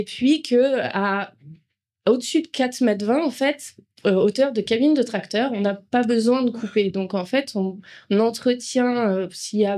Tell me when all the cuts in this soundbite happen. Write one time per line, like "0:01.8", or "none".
none